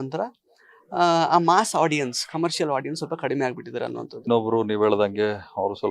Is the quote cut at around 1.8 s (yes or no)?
no